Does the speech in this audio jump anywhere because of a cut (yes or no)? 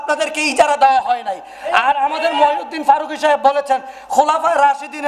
no